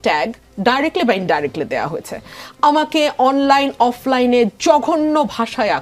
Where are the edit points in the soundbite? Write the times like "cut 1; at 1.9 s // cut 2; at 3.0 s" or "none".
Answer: none